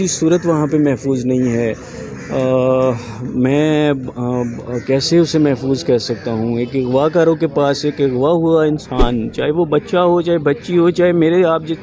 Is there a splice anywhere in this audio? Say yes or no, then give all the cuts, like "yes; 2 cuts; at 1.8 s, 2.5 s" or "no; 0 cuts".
no; 0 cuts